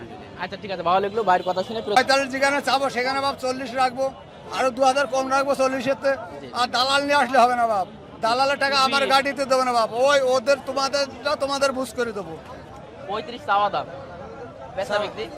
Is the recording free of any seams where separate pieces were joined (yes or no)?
no